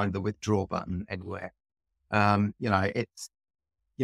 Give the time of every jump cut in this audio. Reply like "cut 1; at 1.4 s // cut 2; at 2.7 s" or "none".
none